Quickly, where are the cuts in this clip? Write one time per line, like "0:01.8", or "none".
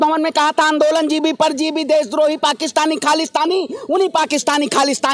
none